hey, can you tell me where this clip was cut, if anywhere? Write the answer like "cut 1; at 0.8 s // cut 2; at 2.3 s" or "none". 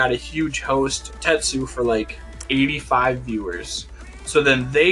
cut 1; at 1.1 s // cut 2; at 2.4 s